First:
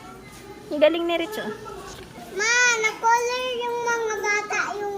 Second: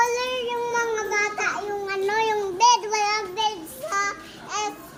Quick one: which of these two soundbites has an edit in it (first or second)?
first